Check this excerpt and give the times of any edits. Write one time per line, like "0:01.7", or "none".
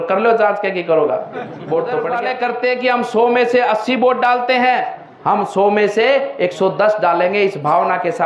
0:02.2